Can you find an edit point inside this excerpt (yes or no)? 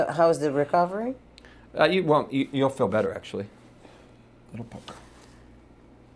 no